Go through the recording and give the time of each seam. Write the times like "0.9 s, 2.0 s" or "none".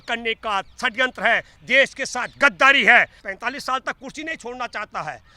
3.2 s